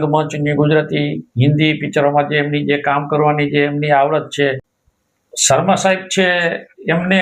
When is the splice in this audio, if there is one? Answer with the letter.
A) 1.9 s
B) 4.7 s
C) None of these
B